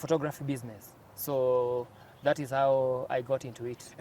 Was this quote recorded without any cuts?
yes; 0 cuts

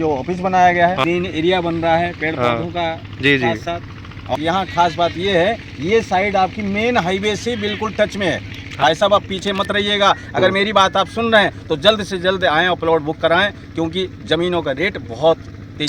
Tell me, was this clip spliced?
yes; 3 cuts; at 1.0 s, 4.4 s, 8.8 s

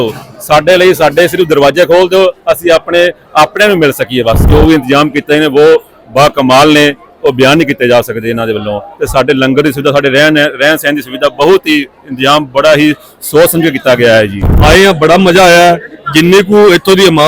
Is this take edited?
yes; 2 cuts; at 4.5 s, 14.5 s

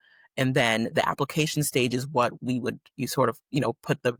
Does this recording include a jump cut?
no; 0 cuts

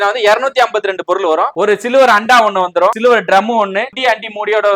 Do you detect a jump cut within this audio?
yes; 3 cuts; at 1.5 s, 3.0 s, 3.9 s

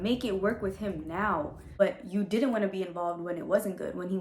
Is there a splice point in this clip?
yes; 1 cut; at 1.6 s

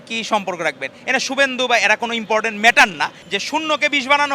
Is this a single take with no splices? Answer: no; 1 cut; at 3.2 s

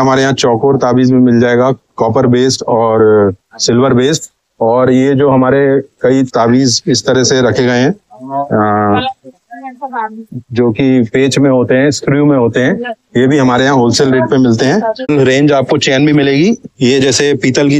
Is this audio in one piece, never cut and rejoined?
no; 1 cut; at 15.1 s

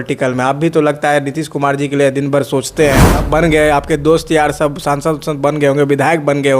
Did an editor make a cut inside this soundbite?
yes; 1 cut; at 3.1 s

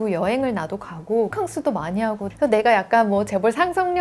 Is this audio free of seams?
yes; 0 cuts

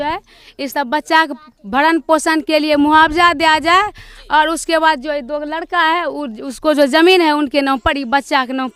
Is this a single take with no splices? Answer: yes; 0 cuts

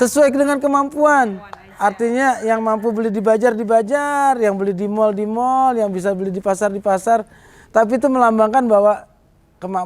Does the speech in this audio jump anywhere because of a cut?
no; 0 cuts

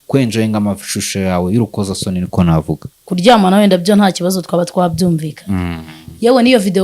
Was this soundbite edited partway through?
yes; 1 cut; at 2.9 s

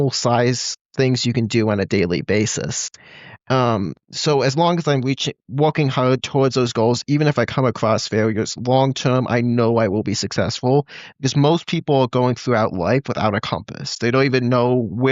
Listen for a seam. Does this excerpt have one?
no; 0 cuts

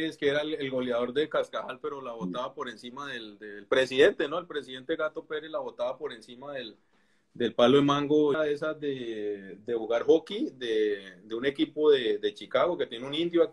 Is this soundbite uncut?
no; 1 cut; at 8.4 s

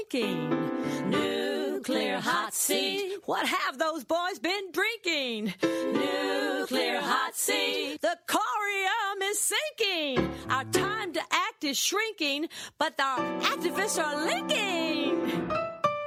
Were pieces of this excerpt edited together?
no; 0 cuts

